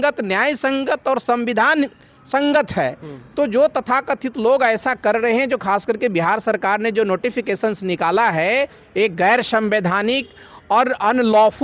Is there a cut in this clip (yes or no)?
no